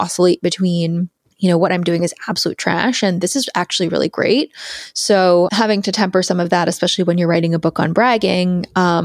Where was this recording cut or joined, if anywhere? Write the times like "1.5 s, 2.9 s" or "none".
1.2 s, 5.5 s